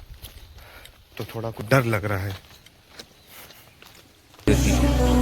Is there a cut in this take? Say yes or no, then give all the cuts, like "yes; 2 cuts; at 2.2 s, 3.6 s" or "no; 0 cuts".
yes; 2 cuts; at 1.6 s, 4.5 s